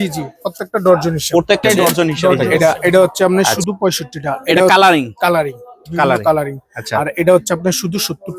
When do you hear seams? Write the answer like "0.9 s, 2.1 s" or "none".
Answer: 2.4 s